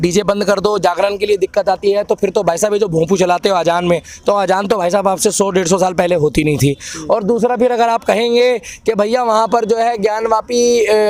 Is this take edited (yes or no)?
no